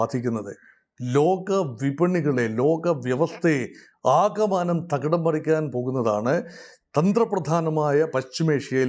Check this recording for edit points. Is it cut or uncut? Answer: uncut